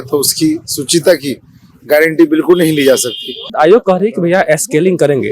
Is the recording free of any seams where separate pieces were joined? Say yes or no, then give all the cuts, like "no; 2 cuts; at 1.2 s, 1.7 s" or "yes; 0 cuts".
no; 1 cut; at 3.5 s